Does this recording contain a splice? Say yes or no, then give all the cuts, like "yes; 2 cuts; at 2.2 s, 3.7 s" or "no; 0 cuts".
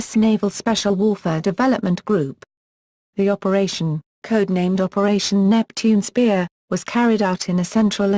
no; 0 cuts